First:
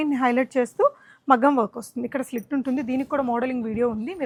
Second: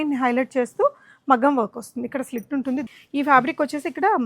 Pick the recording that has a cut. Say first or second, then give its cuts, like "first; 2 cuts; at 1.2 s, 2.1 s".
second; 1 cut; at 2.9 s